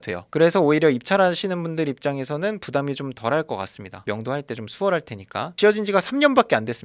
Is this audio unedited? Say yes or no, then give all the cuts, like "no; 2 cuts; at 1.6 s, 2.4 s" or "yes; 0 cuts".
yes; 0 cuts